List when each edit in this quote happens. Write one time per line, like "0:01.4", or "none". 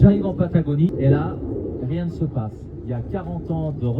0:00.9